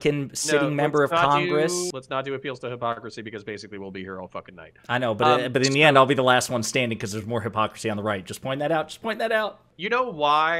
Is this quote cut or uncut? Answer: cut